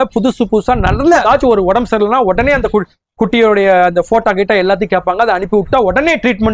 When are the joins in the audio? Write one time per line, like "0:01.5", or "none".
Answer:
0:01.2

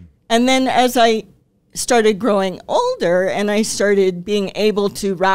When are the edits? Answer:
none

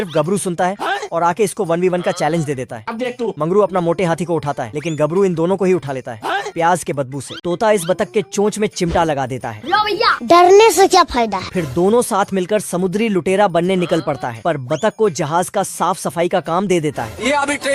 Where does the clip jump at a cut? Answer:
0:07.4

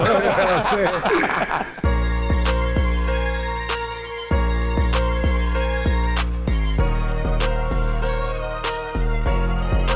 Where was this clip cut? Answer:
0:01.8

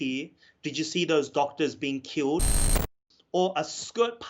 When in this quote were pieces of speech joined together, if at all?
0:02.8

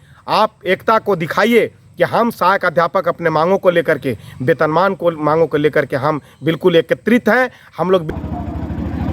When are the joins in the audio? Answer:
0:08.0

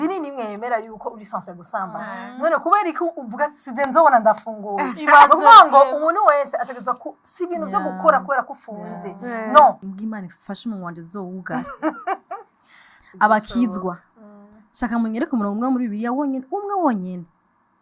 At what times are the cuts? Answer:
0:09.9

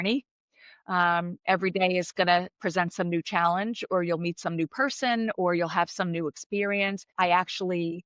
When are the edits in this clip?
0:07.0

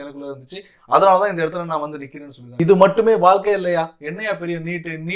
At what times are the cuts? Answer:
0:02.5

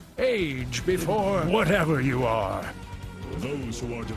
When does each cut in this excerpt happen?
0:01.4

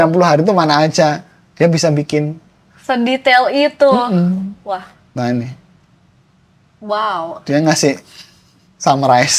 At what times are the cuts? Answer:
0:05.0

